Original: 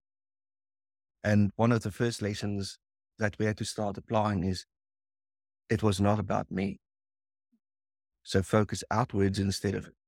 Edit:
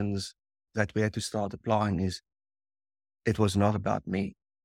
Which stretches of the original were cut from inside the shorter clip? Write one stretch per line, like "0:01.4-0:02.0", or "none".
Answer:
none